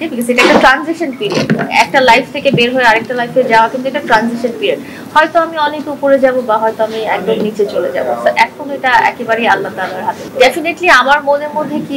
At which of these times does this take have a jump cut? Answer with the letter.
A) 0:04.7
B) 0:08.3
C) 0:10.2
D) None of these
C